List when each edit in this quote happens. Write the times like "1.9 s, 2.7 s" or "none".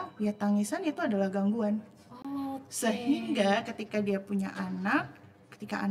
none